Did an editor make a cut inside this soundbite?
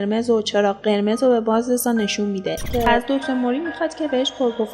yes; 1 cut; at 2.7 s

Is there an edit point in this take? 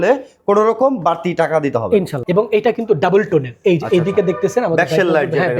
yes; 1 cut; at 2.2 s

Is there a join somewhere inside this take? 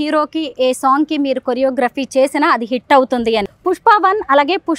yes; 1 cut; at 3.5 s

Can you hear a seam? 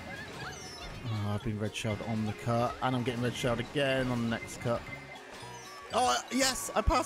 no; 0 cuts

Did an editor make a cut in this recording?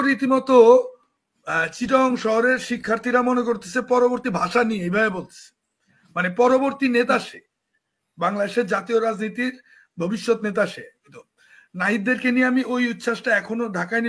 no; 0 cuts

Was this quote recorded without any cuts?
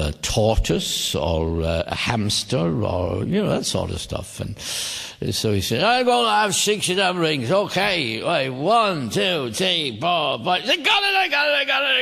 no; 1 cut; at 6.3 s

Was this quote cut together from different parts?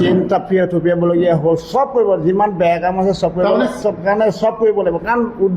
yes; 1 cut; at 3.8 s

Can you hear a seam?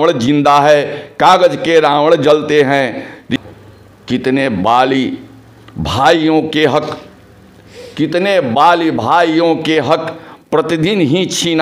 yes; 1 cut; at 3.3 s

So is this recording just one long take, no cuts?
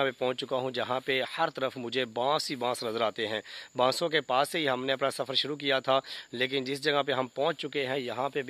yes; 0 cuts

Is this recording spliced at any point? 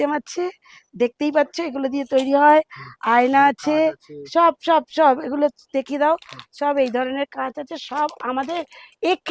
no; 0 cuts

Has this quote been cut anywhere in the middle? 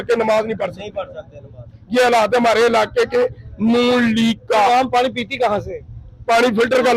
no; 0 cuts

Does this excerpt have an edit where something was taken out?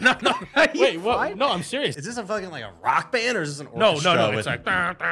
yes; 1 cut; at 2.0 s

